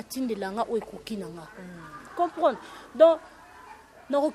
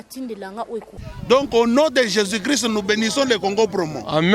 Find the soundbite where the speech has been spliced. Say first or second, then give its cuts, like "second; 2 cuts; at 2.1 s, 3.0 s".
second; 1 cut; at 1.0 s